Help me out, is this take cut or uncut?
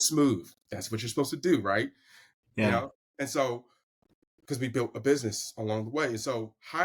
uncut